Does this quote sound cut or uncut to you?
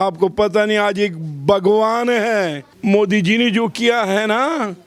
cut